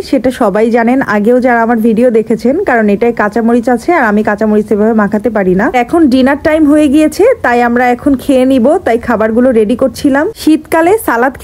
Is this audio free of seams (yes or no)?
yes